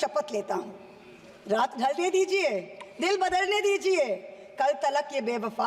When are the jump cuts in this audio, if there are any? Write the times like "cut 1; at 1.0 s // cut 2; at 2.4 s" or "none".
none